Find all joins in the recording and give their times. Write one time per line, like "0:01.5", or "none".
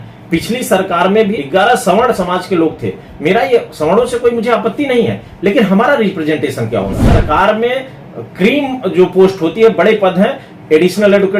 0:01.4
0:07.1